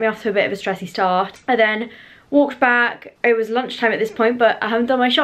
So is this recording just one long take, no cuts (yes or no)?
yes